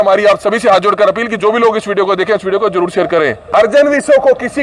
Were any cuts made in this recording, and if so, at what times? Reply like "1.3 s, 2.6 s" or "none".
3.7 s